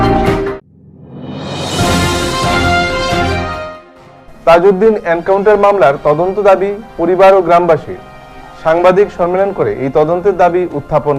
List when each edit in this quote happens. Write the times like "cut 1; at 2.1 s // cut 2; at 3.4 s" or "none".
cut 1; at 3.6 s